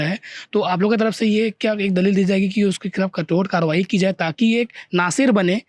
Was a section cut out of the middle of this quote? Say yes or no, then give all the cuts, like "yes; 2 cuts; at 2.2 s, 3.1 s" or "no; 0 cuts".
no; 0 cuts